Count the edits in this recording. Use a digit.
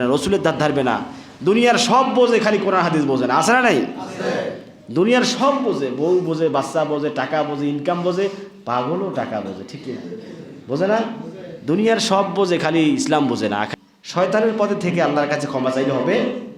1